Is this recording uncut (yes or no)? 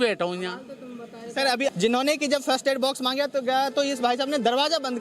no